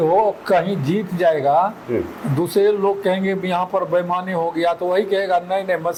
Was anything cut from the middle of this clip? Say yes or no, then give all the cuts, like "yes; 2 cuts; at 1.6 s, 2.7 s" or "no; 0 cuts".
no; 0 cuts